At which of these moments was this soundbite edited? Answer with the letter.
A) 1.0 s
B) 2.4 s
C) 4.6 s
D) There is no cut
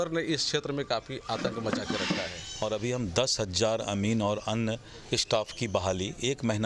B